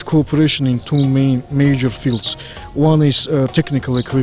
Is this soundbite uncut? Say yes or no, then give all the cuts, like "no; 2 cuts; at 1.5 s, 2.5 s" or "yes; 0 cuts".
yes; 0 cuts